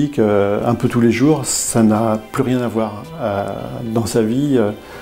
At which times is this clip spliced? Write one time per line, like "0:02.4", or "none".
none